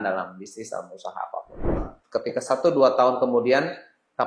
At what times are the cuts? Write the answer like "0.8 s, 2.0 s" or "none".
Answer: 1.9 s